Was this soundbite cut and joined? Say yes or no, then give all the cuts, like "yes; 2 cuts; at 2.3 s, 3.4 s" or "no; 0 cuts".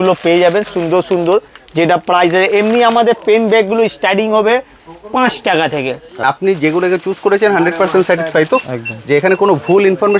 yes; 1 cut; at 6.2 s